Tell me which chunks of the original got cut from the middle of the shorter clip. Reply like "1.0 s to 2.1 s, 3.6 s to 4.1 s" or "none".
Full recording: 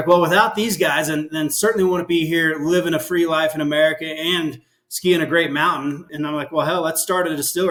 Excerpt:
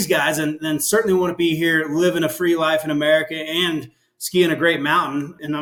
none